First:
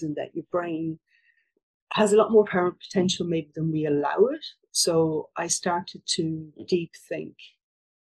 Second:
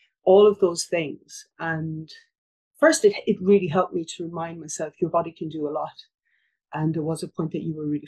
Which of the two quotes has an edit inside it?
second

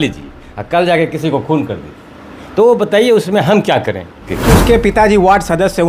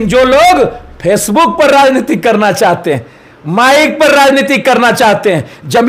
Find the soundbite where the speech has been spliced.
first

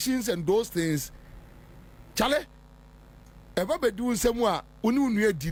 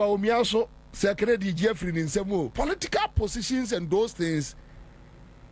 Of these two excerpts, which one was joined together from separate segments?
second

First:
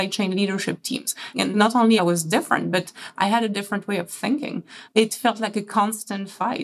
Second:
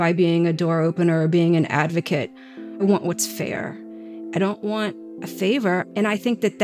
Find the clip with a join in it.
first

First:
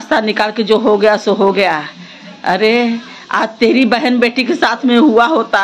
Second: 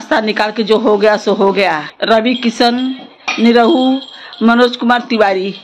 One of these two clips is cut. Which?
second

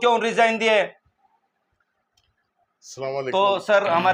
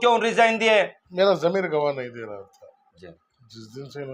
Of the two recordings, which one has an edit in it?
second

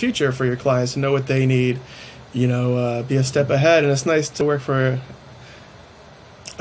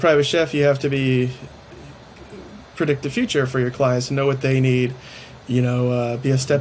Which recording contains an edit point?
first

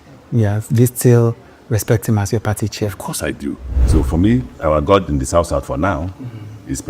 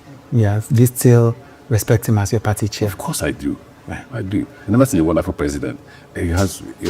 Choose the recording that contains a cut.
first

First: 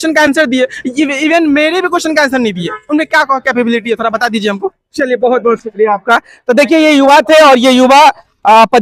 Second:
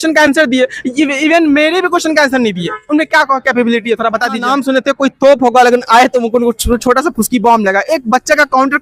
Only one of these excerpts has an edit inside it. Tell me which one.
second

